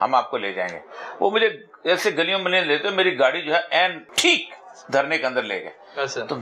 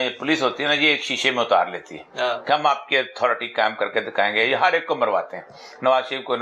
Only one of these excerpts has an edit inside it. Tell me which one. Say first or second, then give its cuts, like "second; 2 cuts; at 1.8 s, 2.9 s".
first; 1 cut; at 4.1 s